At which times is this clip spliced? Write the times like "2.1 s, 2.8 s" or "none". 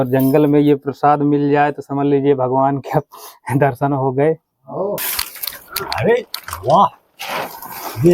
5.1 s